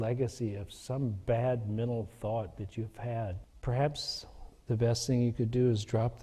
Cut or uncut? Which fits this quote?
cut